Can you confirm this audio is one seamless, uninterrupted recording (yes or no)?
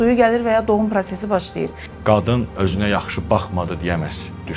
no